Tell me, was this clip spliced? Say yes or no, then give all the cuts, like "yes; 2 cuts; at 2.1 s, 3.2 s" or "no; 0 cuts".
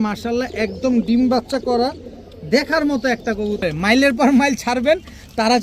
yes; 1 cut; at 3.6 s